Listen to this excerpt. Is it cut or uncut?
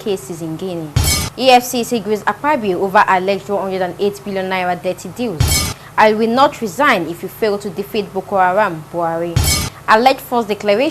uncut